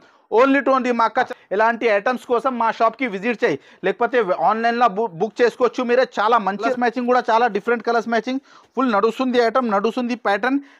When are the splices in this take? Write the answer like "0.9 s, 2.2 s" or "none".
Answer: 1.3 s, 6.7 s